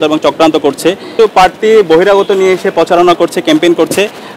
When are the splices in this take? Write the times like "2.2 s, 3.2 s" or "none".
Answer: 1.1 s

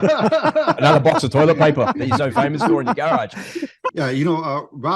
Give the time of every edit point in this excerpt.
3.9 s

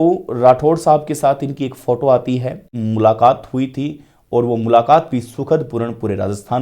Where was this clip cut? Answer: 2.7 s

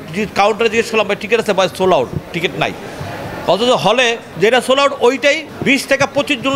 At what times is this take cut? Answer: 4.2 s, 5.5 s

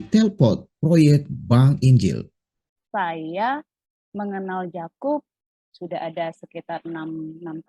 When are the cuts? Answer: 2.5 s, 5.4 s

